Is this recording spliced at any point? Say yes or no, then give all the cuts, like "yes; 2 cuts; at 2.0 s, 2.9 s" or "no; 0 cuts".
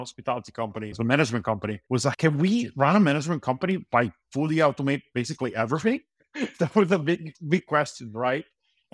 yes; 3 cuts; at 0.9 s, 2.2 s, 6.2 s